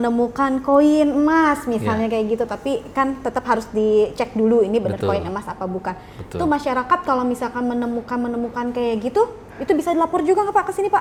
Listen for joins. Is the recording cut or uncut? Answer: uncut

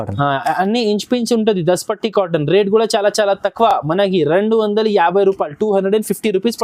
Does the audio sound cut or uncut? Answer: uncut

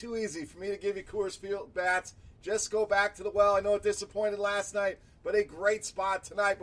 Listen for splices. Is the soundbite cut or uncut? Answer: uncut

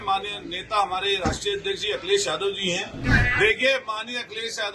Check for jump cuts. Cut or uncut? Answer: cut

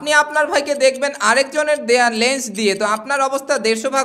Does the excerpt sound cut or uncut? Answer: uncut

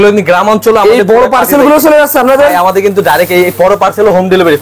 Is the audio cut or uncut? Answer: uncut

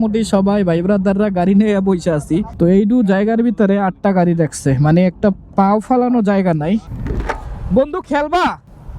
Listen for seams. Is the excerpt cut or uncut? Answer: cut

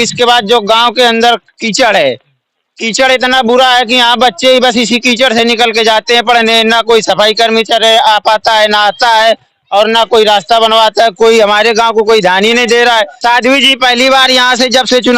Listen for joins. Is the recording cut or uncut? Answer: cut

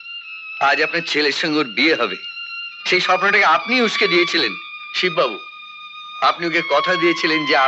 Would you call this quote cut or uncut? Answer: uncut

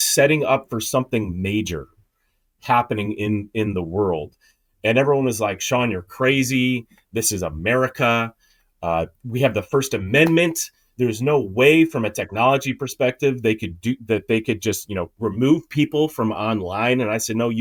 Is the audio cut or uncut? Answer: uncut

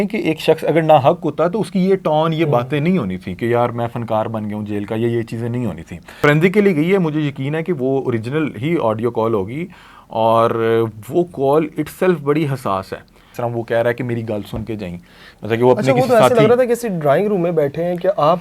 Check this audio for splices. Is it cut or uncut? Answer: cut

